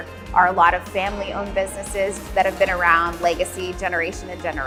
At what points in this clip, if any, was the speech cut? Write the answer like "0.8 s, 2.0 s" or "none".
none